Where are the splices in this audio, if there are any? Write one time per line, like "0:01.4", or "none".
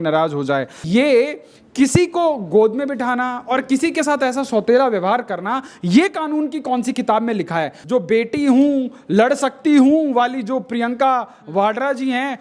0:00.9
0:07.8